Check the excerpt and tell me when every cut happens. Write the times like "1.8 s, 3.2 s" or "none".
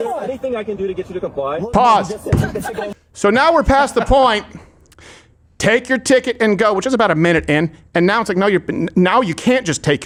none